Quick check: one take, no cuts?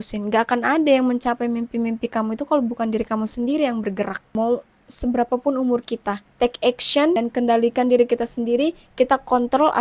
no; 3 cuts; at 4.2 s, 6.2 s, 7.2 s

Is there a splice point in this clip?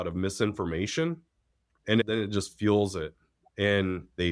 yes; 1 cut; at 1.9 s

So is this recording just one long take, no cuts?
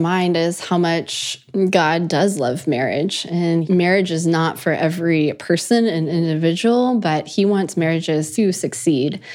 no; 2 cuts; at 3.6 s, 8.3 s

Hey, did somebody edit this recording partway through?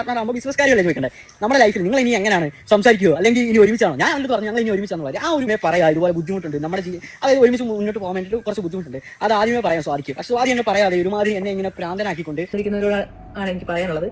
yes; 2 cuts; at 5.5 s, 12.5 s

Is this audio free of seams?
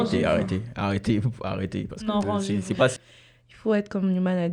no; 1 cut; at 2.9 s

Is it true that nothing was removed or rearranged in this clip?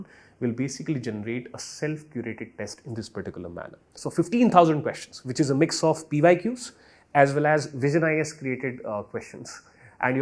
no; 1 cut; at 3.9 s

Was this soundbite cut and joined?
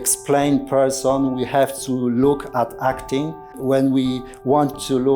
yes; 1 cut; at 3.6 s

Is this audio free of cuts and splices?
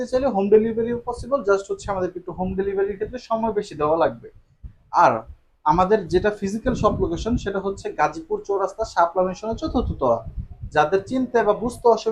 yes; 0 cuts

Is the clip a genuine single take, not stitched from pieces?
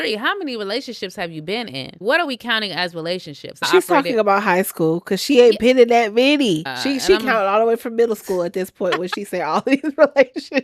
no; 3 cuts; at 2.0 s, 3.7 s, 6.7 s

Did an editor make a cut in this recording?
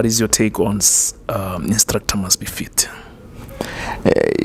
no; 0 cuts

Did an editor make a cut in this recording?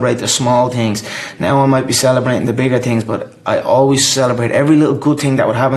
no; 0 cuts

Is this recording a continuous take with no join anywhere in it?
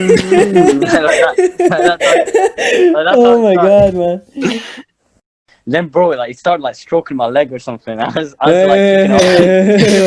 no; 1 cut; at 5.2 s

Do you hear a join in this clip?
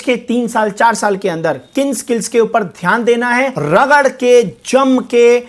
yes; 1 cut; at 3.6 s

